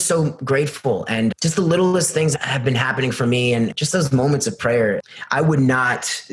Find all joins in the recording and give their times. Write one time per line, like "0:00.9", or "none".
0:01.3
0:02.3
0:03.7
0:05.0